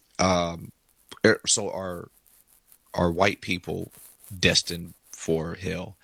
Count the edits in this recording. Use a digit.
0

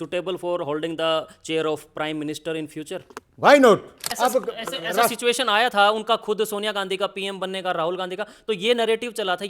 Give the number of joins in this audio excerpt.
1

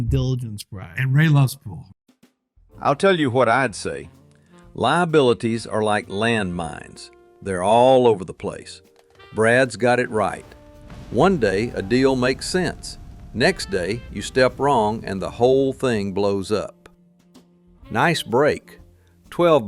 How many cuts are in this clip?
1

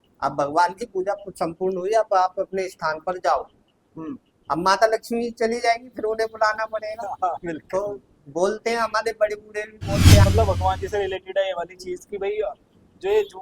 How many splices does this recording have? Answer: 1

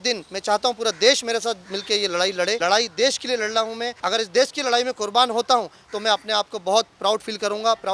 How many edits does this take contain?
2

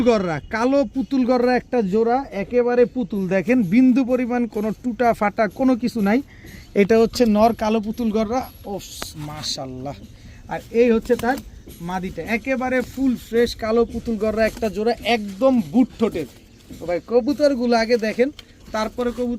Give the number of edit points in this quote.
0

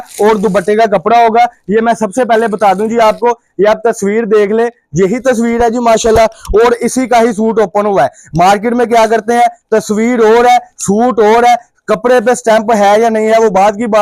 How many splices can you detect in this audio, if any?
0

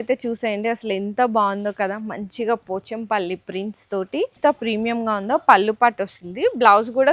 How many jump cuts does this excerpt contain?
1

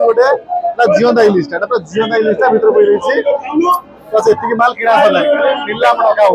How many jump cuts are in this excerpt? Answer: 0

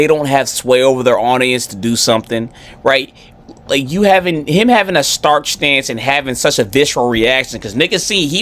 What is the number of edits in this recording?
0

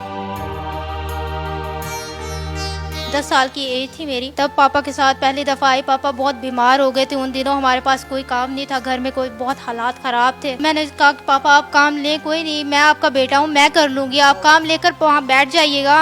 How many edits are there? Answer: 0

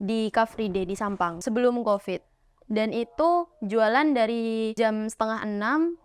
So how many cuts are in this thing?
2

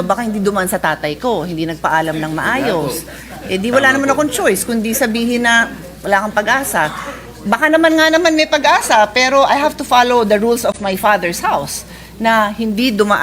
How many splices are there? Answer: 0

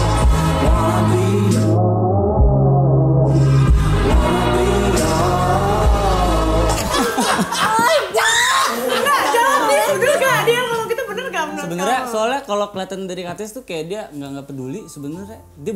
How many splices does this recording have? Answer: 0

